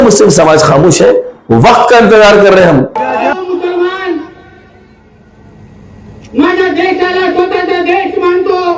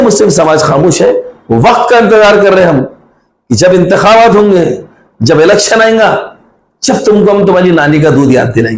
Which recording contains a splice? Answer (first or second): first